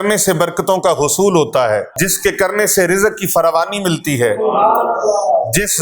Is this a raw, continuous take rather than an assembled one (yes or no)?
no